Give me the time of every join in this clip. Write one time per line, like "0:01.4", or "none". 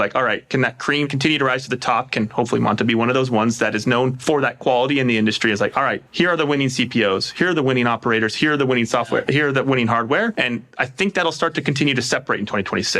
0:04.2
0:10.4